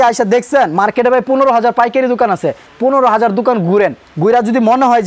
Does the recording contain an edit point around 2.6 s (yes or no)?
yes